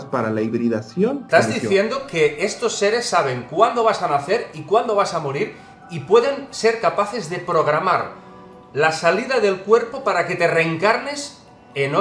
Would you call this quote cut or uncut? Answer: cut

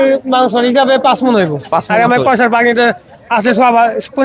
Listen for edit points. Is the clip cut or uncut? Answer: uncut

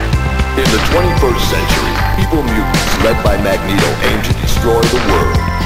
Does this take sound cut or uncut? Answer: uncut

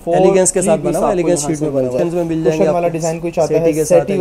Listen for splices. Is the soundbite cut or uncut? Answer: cut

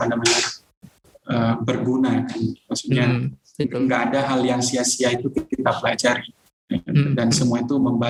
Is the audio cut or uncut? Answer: uncut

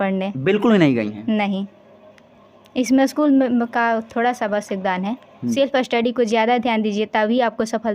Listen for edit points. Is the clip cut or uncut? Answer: cut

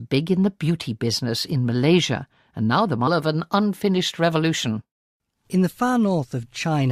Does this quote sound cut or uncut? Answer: uncut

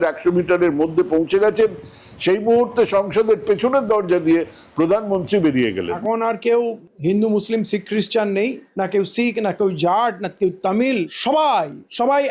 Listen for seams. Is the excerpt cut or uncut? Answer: cut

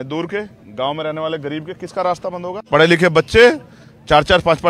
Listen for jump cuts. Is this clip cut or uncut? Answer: cut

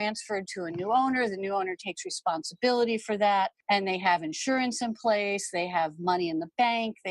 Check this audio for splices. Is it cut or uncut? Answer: cut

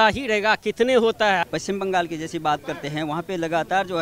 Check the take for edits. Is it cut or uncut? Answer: cut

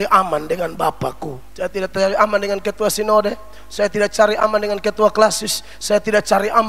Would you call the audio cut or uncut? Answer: cut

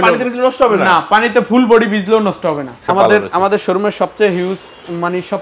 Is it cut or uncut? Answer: cut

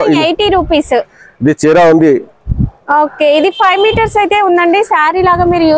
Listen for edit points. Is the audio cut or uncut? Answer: uncut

